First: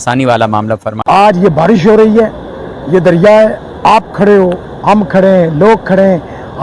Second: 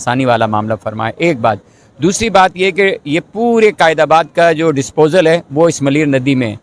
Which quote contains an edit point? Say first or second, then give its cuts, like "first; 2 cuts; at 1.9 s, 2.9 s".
first; 1 cut; at 0.9 s